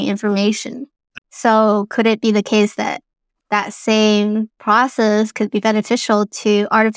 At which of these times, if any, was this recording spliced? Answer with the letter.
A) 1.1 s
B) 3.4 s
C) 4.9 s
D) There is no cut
A